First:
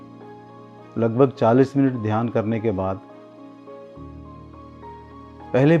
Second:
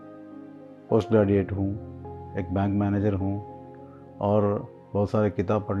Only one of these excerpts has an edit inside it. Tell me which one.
first; 2 cuts; at 3.0 s, 5.1 s

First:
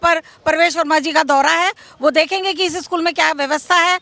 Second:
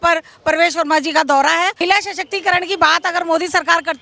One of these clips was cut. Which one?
second; 1 cut; at 1.8 s

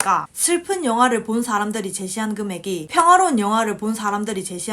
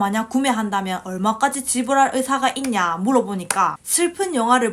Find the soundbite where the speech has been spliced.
first; 1 cut; at 2.9 s

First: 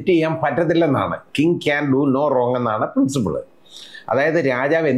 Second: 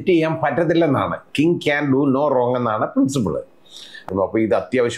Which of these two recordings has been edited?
second; 1 cut; at 4.1 s

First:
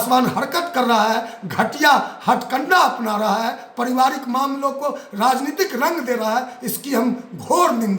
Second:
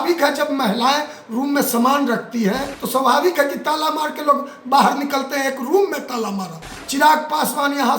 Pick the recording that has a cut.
second; 2 cuts; at 2.7 s, 6.8 s

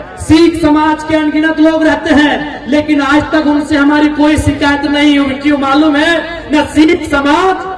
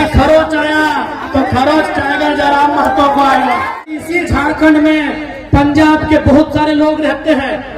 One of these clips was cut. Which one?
second; 1 cut; at 4.0 s

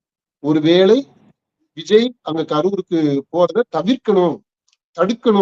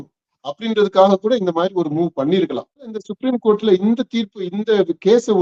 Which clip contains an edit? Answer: second; 1 cut; at 3.1 s

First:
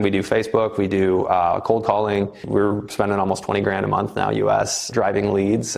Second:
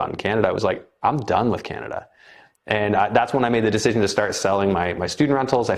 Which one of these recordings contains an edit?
first; 2 cuts; at 2.5 s, 4.8 s

